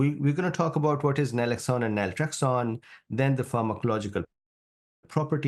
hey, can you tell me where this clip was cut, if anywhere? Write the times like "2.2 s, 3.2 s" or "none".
none